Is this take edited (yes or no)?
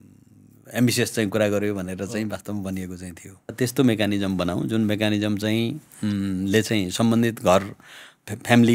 yes